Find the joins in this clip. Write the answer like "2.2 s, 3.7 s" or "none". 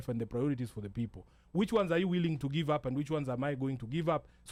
none